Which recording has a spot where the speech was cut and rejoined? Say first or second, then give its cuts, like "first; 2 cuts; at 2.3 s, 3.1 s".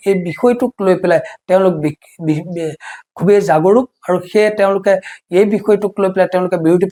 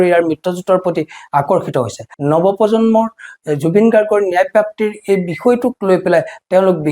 second; 1 cut; at 2.1 s